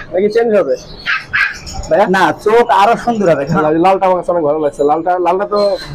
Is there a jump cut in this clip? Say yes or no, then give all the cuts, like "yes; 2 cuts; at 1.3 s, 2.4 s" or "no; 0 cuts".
yes; 1 cut; at 3.6 s